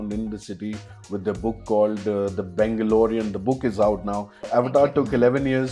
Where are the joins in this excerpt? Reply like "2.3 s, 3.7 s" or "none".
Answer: 4.4 s

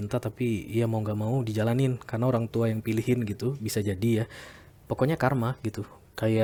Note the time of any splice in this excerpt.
none

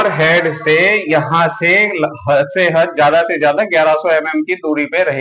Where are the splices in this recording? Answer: none

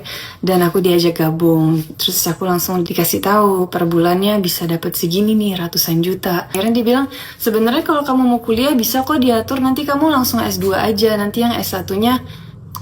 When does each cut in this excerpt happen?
6.5 s

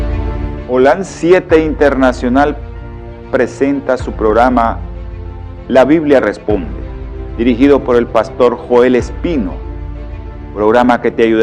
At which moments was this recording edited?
3.6 s

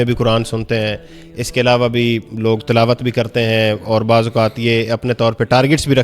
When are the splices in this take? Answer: none

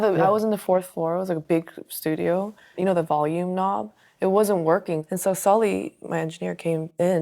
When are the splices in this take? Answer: 2.8 s, 5.0 s

